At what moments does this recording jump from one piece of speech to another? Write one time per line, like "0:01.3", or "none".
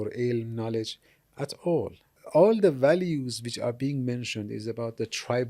0:02.2